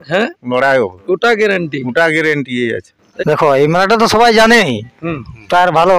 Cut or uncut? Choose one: cut